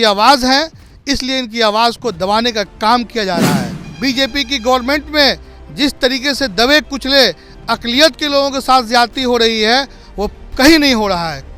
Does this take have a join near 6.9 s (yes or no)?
no